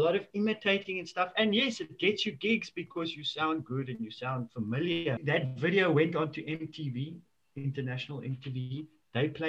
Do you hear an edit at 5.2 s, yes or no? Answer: yes